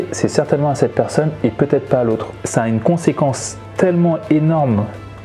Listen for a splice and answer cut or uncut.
cut